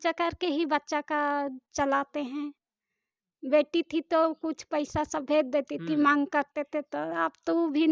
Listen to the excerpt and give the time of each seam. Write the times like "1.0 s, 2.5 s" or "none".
none